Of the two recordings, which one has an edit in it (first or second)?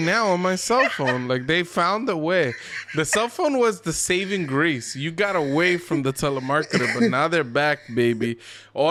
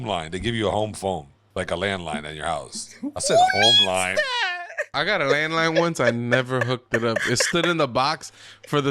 second